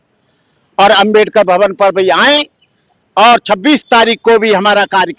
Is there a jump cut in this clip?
no; 0 cuts

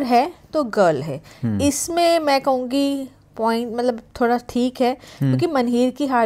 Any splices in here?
no; 0 cuts

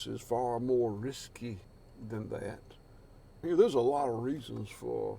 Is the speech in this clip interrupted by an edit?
no; 0 cuts

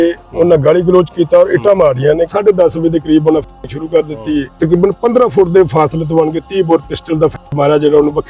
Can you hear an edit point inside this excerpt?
yes; 2 cuts; at 2.3 s, 4.5 s

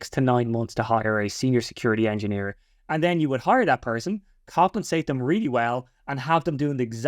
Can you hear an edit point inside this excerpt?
no; 0 cuts

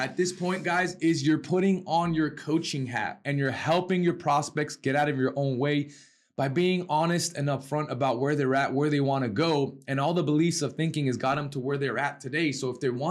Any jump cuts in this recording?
yes; 1 cut; at 3.2 s

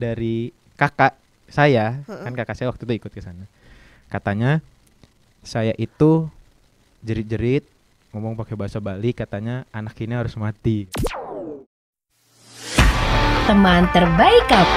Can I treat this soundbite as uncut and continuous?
no; 1 cut; at 10.9 s

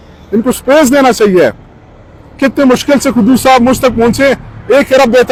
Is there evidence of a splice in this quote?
no; 0 cuts

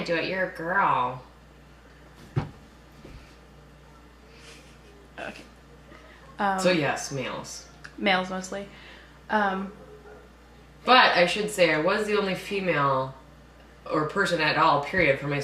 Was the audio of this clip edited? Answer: yes; 1 cut; at 4.3 s

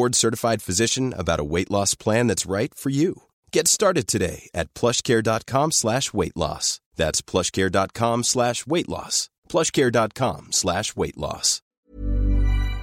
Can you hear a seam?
yes; 1 cut; at 11.6 s

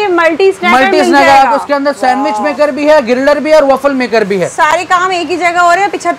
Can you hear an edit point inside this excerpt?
no; 0 cuts

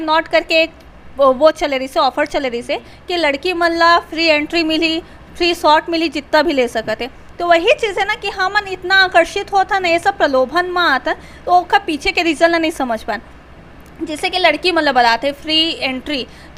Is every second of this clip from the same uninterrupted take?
yes; 0 cuts

